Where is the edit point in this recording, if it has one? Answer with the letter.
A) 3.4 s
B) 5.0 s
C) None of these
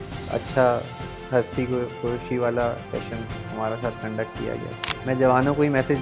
B